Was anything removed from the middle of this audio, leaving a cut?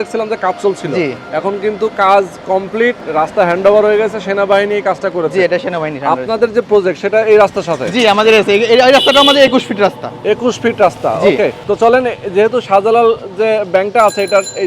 no; 0 cuts

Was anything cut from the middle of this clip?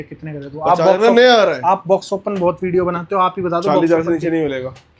no; 0 cuts

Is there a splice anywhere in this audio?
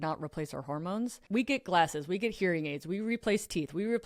yes; 1 cut; at 1.2 s

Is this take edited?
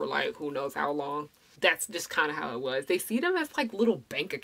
yes; 1 cut; at 1.4 s

